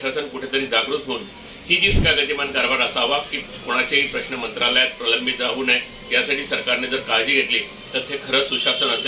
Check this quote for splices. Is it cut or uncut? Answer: cut